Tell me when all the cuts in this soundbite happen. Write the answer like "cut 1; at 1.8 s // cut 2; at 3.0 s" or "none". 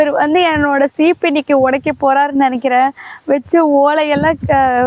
none